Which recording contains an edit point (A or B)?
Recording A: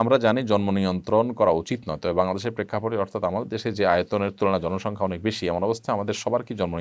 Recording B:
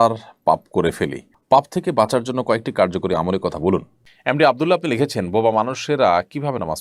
B